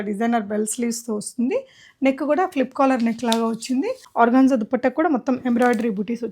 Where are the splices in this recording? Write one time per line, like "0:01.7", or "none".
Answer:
0:04.0